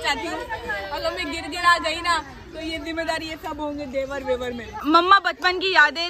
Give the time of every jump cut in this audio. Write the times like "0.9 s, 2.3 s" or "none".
4.7 s